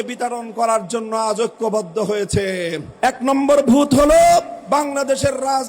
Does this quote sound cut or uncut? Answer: cut